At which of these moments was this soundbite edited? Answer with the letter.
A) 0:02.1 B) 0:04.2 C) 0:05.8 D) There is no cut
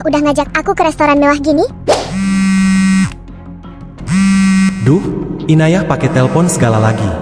A